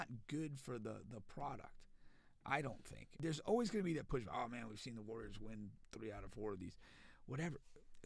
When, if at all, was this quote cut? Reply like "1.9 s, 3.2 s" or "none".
3.1 s